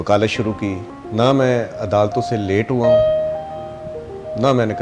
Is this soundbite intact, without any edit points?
no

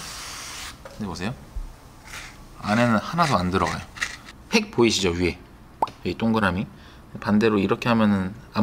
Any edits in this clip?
yes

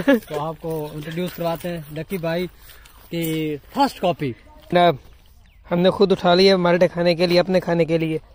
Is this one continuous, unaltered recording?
no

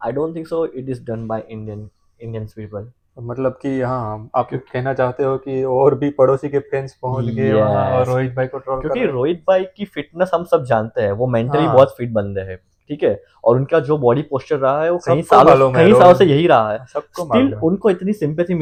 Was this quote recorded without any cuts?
yes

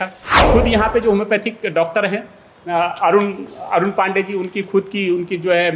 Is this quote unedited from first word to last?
yes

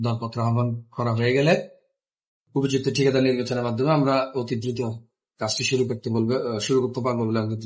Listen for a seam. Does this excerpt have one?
no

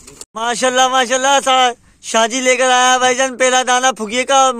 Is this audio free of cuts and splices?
yes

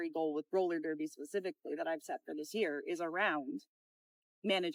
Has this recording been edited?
no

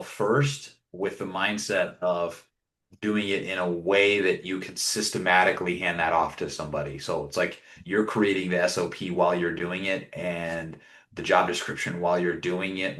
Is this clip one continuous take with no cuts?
yes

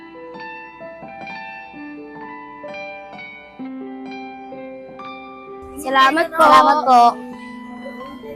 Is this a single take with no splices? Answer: yes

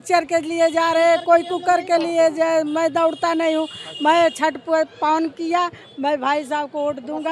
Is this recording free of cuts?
yes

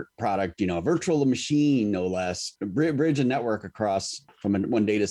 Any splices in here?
yes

